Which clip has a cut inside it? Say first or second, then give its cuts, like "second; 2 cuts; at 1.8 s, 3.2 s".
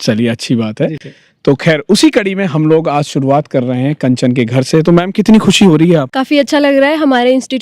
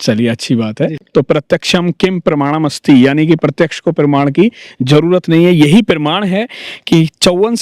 second; 1 cut; at 1.0 s